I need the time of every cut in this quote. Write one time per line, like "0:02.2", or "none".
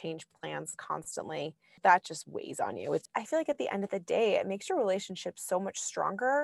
0:01.6
0:03.1